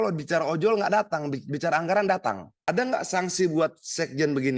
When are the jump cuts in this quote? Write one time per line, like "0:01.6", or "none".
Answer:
0:02.5